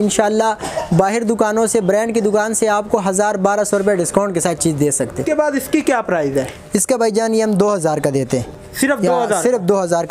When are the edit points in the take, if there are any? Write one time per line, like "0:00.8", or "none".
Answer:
0:05.3